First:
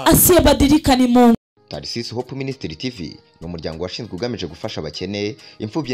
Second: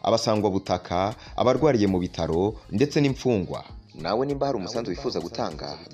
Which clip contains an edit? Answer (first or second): first